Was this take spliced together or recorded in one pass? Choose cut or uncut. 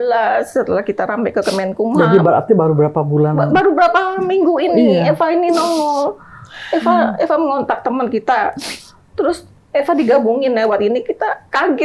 uncut